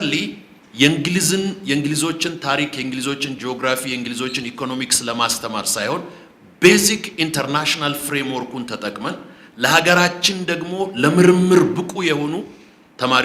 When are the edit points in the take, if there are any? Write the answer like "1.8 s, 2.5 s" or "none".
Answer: none